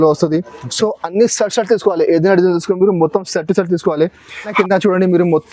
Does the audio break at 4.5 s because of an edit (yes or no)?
yes